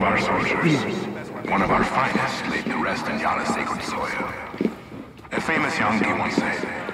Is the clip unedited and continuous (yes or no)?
yes